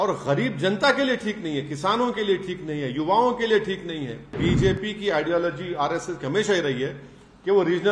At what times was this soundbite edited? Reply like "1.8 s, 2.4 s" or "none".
4.4 s